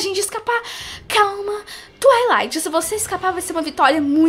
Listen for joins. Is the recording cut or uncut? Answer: uncut